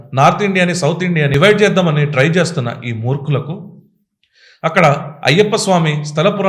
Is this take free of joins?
no; 1 cut; at 1.3 s

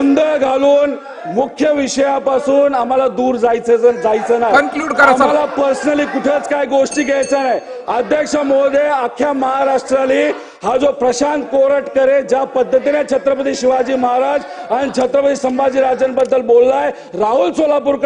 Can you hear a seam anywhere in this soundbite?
no; 0 cuts

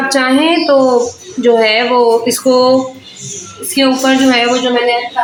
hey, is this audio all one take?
yes; 0 cuts

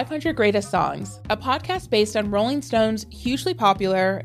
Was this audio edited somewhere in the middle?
yes; 1 cut; at 1.1 s

